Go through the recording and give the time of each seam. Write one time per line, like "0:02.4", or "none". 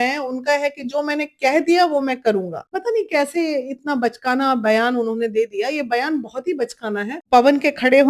0:02.7
0:07.2